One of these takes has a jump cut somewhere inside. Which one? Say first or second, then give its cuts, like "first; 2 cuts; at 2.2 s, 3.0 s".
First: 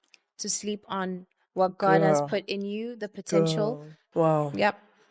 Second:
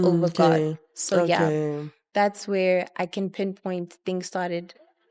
first; 1 cut; at 3.9 s